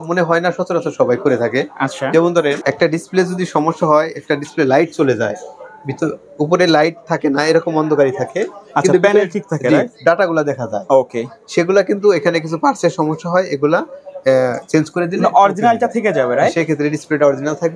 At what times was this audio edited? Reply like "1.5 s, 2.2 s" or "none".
none